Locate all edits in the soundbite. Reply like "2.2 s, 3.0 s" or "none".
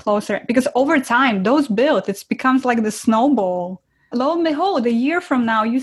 none